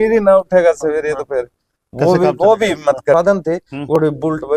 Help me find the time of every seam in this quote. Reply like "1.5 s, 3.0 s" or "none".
3.1 s

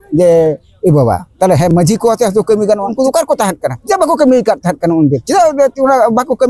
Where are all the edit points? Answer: 2.9 s, 3.7 s, 5.2 s

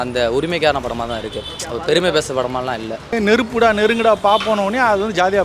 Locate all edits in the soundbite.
3.0 s

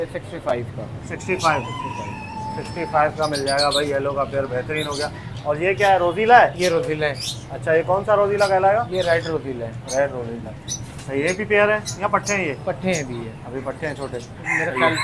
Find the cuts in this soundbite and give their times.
none

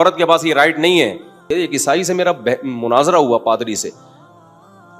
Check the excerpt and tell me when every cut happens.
1.5 s

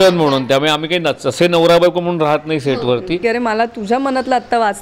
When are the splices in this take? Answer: 3.2 s

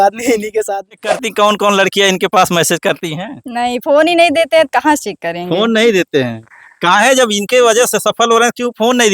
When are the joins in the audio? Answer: 1.0 s

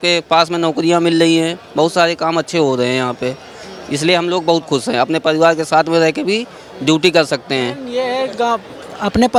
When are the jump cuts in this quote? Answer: none

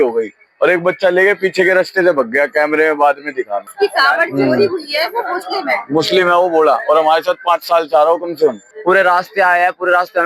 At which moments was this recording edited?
3.6 s, 8.7 s

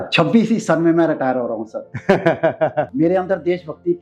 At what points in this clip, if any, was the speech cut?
2.9 s

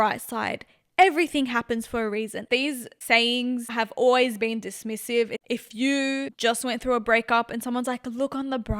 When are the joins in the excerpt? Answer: 2.4 s, 5.4 s, 6.3 s

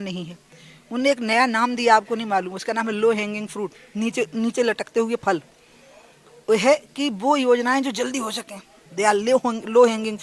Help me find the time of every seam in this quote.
none

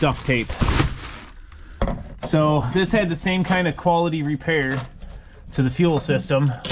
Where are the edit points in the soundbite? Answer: none

